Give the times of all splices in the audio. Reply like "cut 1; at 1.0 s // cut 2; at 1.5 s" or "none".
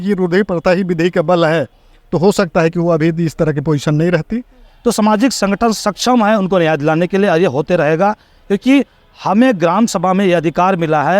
cut 1; at 4.7 s